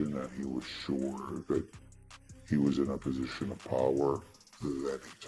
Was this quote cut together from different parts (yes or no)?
no